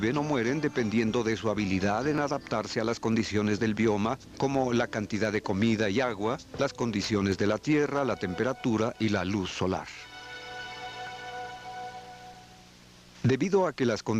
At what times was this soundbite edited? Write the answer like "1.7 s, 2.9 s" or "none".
7.6 s